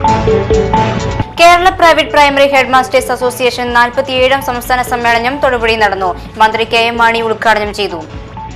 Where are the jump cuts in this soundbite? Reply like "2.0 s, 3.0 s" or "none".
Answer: 1.1 s